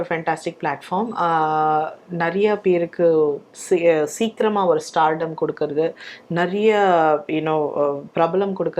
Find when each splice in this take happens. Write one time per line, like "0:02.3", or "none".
none